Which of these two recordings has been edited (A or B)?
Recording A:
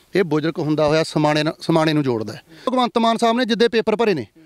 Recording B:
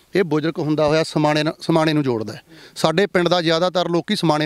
A